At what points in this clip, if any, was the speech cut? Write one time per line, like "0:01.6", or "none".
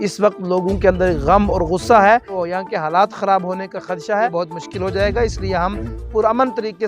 0:02.4
0:04.3